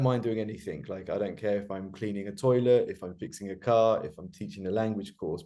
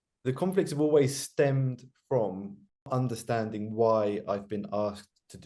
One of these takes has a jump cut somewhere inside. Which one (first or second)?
second